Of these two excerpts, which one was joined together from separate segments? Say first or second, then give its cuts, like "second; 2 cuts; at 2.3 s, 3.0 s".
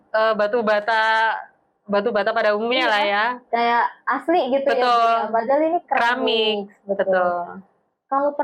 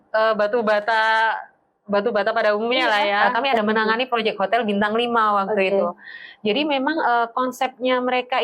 second; 1 cut; at 3.2 s